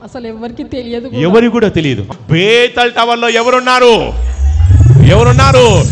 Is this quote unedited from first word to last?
no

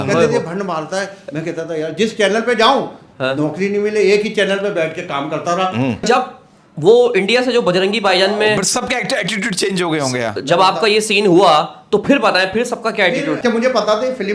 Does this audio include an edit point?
yes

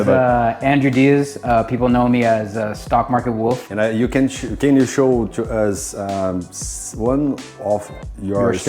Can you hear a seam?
yes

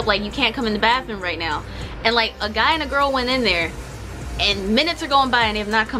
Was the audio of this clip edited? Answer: no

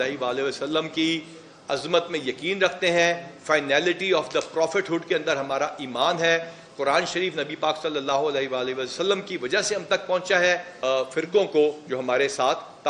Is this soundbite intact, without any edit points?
no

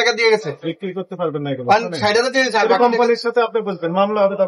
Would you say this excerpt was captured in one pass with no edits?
yes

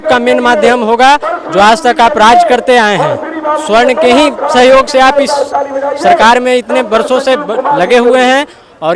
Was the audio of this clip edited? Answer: no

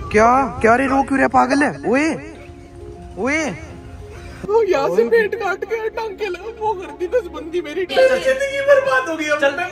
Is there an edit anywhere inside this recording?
yes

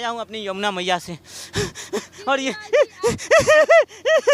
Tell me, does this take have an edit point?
no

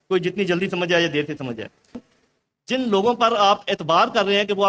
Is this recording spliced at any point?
yes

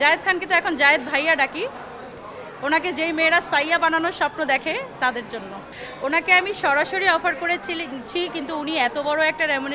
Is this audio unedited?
yes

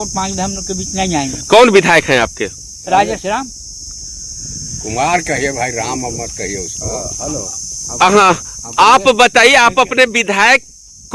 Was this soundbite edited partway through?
no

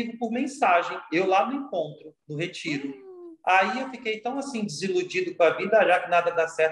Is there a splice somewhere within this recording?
no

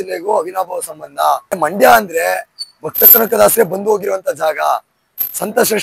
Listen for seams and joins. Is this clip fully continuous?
no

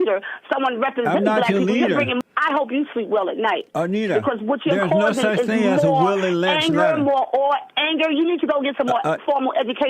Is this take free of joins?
no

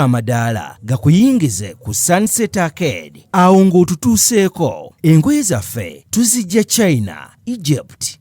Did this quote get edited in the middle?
no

